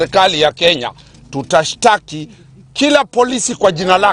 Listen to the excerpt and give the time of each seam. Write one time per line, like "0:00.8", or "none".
none